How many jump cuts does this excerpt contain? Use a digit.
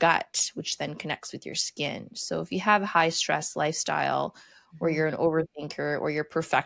0